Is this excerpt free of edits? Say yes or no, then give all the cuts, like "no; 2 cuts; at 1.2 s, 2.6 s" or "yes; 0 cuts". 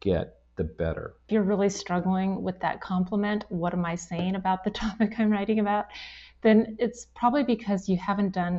no; 1 cut; at 1.2 s